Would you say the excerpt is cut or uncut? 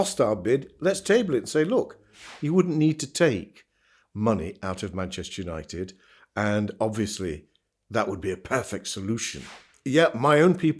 cut